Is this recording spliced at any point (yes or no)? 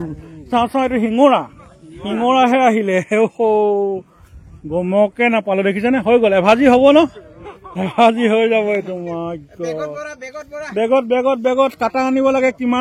no